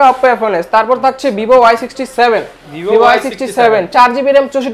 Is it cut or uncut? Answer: uncut